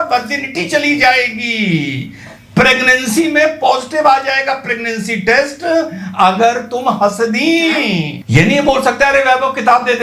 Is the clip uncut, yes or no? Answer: no